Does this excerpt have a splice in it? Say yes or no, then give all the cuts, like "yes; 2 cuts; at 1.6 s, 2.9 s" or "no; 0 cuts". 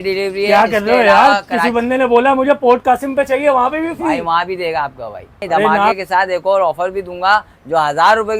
yes; 1 cut; at 6.0 s